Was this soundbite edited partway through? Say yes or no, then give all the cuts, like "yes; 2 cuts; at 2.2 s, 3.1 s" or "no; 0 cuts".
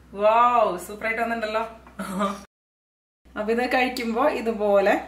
yes; 1 cut; at 2.9 s